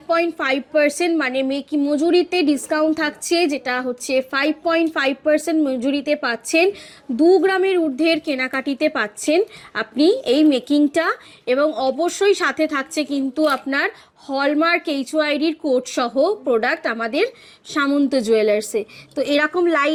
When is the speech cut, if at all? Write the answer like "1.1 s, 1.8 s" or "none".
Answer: none